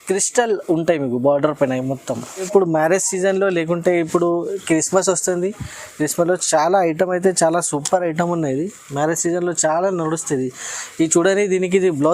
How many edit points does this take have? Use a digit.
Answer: 1